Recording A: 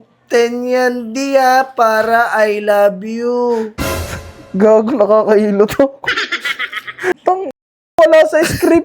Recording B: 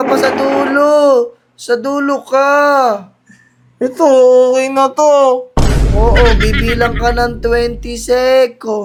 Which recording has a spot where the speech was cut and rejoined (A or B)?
A